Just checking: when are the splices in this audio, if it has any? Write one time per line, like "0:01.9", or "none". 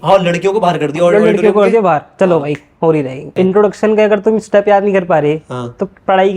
0:03.3